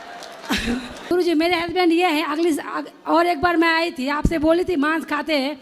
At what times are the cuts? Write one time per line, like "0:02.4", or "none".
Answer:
0:01.1

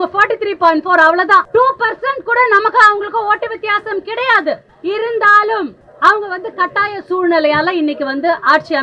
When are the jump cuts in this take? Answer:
0:01.5
0:04.7
0:05.8

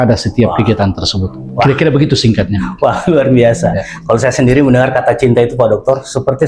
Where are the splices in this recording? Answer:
none

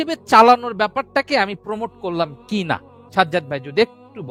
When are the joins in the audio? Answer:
none

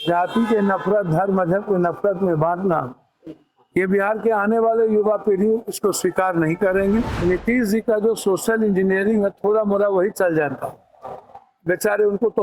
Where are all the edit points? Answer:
0:07.1

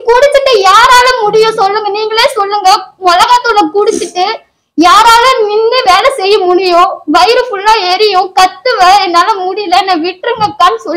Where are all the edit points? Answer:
none

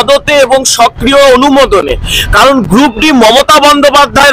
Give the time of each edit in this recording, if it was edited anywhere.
none

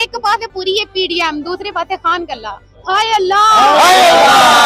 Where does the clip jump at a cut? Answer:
none

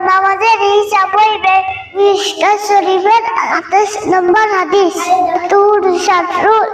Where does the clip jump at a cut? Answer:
0:01.9
0:03.5
0:05.4

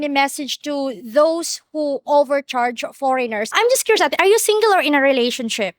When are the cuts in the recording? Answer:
0:03.5

